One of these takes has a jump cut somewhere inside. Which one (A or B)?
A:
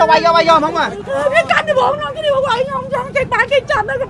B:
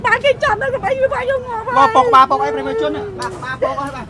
A